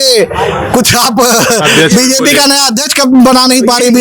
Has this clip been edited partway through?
no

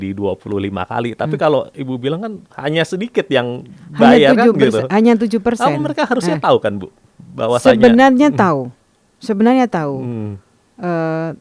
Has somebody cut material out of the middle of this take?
no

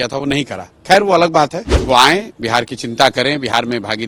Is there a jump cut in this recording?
yes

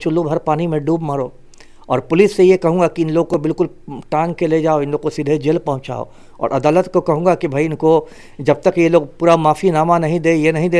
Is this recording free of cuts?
yes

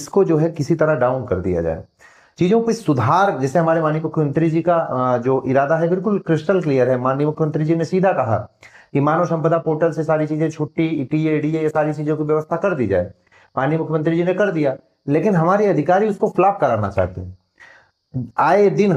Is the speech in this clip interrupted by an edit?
no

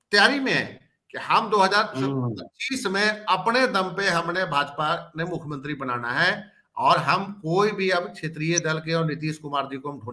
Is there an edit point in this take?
no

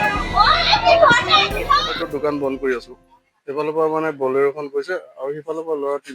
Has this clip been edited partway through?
yes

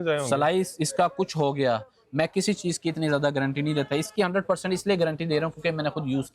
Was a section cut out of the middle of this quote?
yes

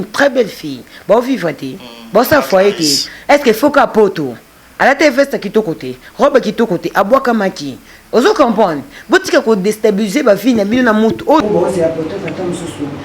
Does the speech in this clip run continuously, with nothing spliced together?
no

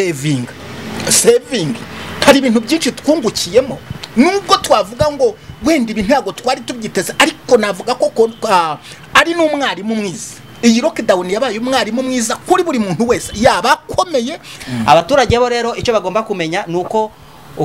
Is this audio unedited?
no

